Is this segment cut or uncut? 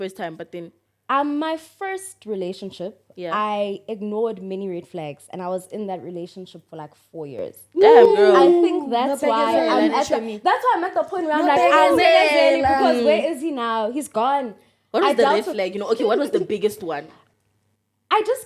cut